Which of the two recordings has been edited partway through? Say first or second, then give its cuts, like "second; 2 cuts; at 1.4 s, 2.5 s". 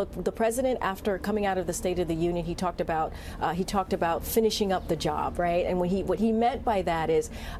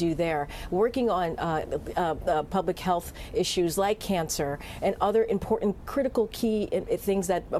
second; 1 cut; at 3.5 s